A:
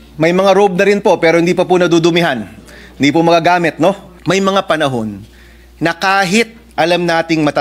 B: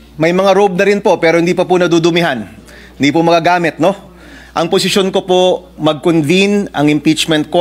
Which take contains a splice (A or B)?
A